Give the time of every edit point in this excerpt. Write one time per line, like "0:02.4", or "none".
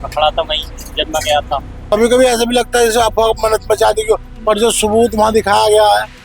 0:01.9

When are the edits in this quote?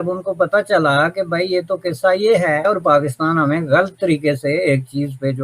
0:02.6

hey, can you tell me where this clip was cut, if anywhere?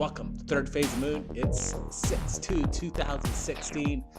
0:02.3

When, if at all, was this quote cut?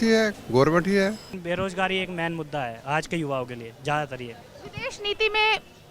0:01.4

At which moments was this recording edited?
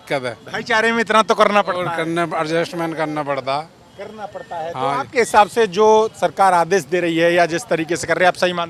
none

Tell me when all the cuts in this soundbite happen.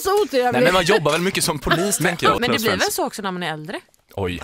0:02.4

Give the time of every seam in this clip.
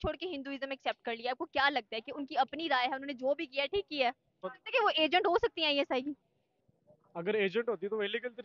0:04.4

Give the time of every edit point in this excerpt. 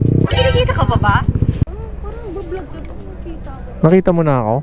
0:01.7

